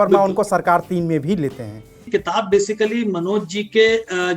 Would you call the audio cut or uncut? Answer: cut